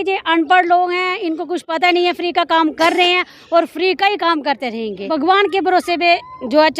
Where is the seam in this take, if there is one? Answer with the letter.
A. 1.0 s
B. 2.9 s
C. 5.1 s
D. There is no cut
C